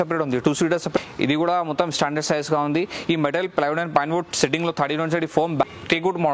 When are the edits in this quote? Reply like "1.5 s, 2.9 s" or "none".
1.0 s, 5.7 s